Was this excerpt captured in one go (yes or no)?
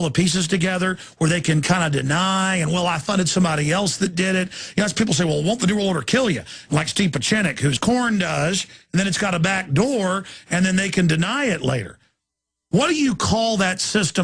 yes